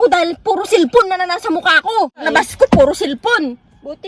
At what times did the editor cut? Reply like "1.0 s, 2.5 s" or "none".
2.2 s